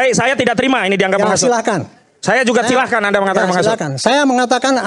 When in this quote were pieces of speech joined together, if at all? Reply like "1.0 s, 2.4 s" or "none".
none